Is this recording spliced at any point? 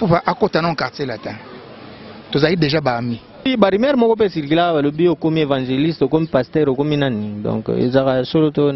yes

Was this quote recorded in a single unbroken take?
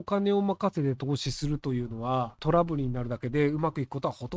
no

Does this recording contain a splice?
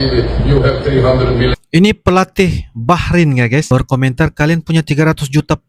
no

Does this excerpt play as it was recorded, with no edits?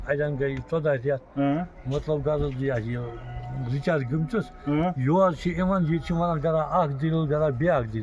yes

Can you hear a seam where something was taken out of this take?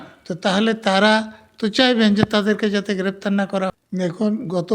yes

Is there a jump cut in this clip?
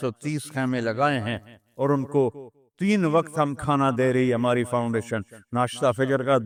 no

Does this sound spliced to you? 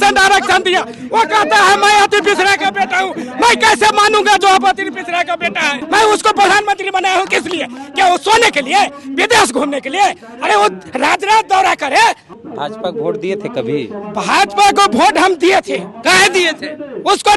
yes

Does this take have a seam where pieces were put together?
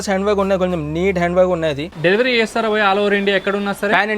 yes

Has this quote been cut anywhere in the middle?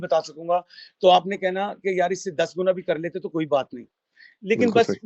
no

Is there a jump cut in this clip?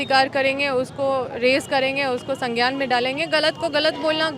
no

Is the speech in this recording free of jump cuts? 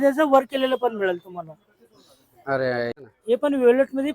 no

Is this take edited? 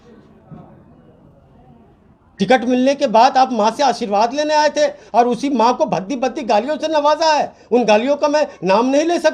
no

